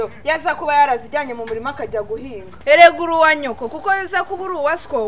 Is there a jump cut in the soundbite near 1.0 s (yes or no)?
no